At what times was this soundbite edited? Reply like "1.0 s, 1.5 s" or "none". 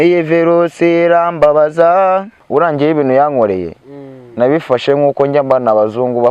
2.4 s